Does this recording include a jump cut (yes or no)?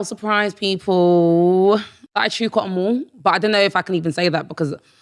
yes